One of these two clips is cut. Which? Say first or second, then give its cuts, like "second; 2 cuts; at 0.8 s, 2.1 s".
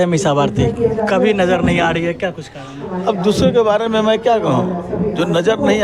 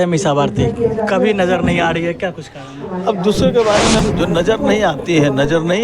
second; 1 cut; at 4.0 s